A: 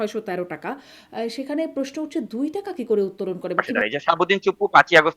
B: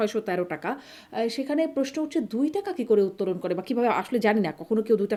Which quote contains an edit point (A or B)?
A